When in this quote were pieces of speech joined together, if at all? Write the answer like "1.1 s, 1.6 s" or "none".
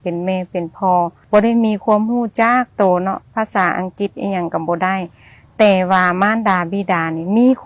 1.2 s